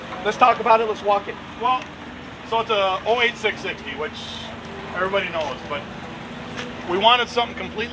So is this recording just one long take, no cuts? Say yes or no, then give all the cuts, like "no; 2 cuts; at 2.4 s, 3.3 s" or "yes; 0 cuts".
yes; 0 cuts